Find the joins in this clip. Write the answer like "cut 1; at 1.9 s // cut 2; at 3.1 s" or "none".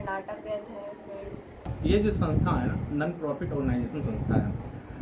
cut 1; at 1.7 s